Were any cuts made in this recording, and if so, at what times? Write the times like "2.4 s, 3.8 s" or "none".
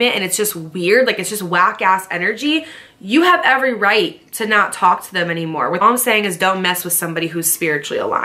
5.8 s